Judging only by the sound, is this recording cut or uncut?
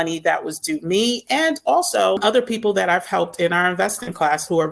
cut